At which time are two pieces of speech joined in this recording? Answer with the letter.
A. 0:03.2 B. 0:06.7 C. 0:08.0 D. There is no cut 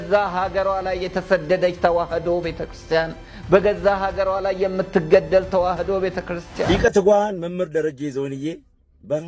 B